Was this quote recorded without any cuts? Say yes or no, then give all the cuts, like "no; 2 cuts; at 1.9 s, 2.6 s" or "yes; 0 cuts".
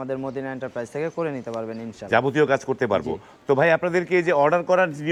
yes; 0 cuts